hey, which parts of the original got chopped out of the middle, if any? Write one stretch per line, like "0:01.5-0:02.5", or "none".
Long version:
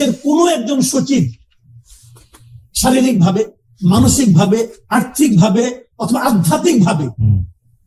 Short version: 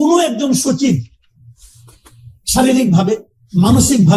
none